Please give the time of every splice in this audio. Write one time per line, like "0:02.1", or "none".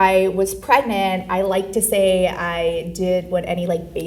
none